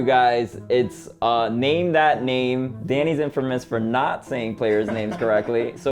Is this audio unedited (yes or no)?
no